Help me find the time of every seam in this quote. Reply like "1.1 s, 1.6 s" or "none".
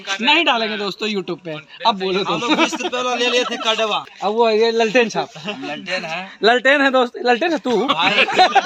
4.1 s